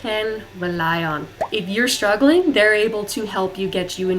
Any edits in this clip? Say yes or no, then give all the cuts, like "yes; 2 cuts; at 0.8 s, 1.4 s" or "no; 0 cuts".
yes; 1 cut; at 1.3 s